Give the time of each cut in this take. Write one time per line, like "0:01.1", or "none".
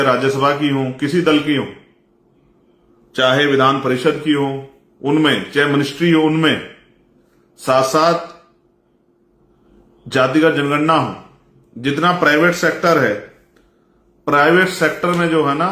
none